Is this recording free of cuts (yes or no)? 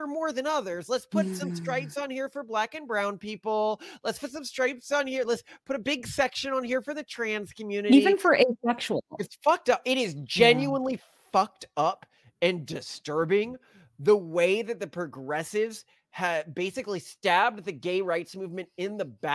no